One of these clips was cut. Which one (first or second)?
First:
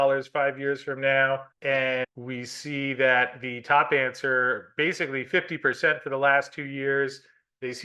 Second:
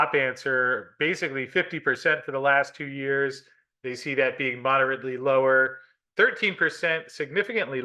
first